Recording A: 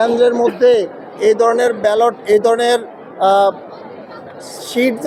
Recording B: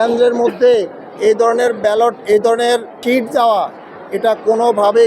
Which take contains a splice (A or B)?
B